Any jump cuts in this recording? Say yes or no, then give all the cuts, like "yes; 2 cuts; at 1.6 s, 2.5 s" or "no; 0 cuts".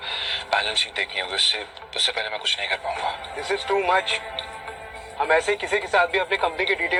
no; 0 cuts